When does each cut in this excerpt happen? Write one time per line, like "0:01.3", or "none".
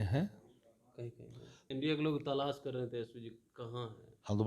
0:01.6